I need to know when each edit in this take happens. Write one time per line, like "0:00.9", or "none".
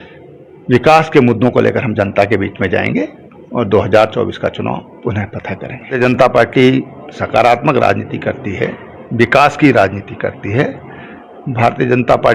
0:05.9